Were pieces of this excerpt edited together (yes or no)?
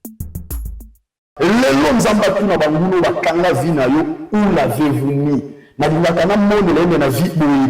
yes